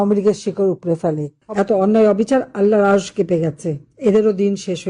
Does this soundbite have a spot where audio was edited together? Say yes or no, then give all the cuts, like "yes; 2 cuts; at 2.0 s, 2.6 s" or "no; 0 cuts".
yes; 1 cut; at 1.4 s